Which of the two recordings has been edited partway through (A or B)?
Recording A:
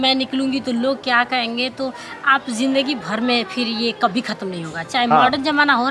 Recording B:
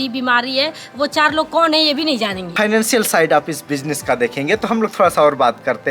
B